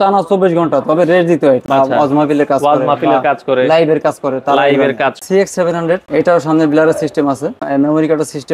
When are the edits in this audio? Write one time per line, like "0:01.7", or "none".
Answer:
0:01.6
0:05.2
0:06.1
0:07.6